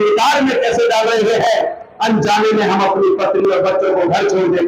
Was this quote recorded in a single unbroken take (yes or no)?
yes